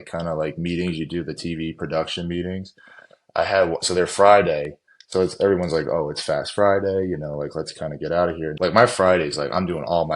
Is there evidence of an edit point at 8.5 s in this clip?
yes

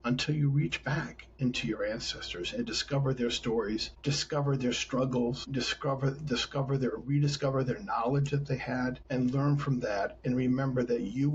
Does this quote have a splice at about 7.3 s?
no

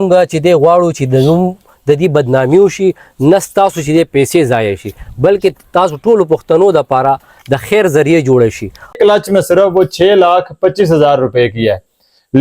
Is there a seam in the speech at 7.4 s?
no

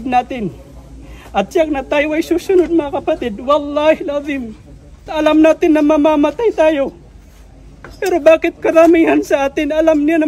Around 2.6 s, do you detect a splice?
no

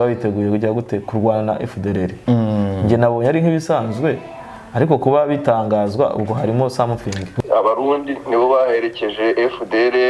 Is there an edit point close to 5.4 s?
no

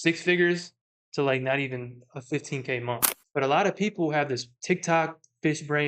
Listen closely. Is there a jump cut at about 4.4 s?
no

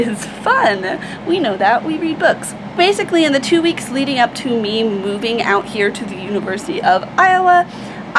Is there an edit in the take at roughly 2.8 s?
yes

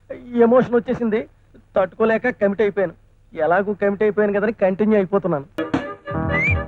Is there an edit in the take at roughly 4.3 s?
no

